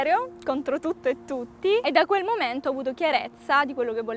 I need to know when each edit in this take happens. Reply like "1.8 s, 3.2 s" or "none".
1.8 s